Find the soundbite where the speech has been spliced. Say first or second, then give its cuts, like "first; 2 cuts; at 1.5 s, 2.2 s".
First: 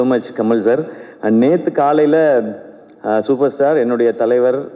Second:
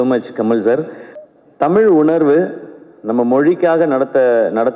second; 1 cut; at 1.0 s